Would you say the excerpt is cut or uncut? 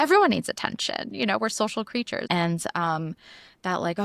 cut